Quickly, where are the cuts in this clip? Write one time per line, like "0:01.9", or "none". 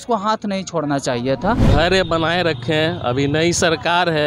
0:01.7